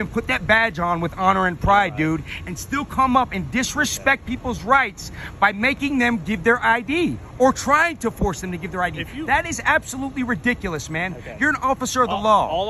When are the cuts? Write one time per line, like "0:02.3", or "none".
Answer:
none